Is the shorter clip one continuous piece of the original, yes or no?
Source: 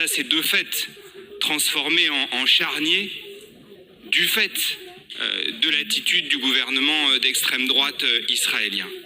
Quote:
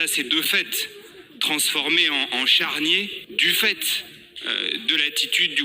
no